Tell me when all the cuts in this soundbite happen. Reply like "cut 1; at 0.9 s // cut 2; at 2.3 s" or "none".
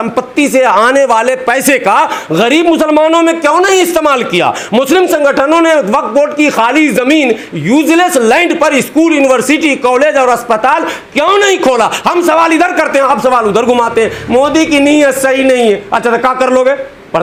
none